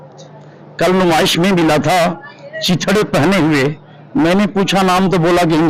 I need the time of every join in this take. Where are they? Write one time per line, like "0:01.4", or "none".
none

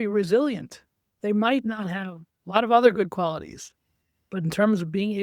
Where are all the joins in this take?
none

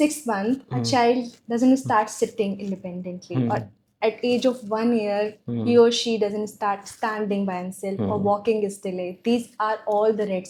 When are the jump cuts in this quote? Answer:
none

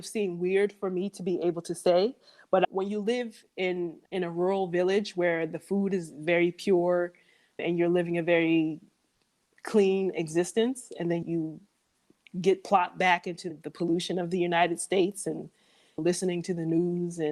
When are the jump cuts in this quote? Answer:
0:11.2
0:13.5

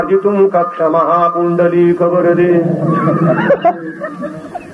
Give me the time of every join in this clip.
none

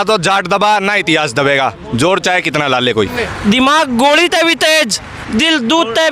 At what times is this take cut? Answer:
0:03.1

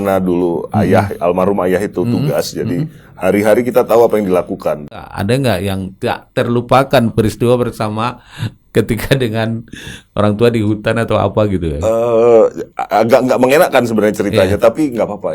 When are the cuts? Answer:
0:05.0

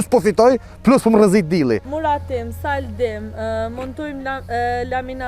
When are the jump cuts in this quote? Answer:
0:01.9

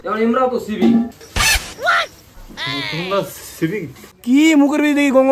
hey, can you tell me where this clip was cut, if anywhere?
0:04.0

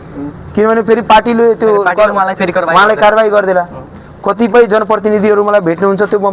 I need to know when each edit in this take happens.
none

